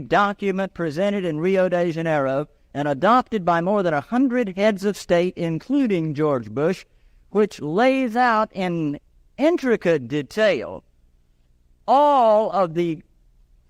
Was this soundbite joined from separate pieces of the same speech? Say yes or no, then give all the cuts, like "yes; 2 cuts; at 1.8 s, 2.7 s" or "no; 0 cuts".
no; 0 cuts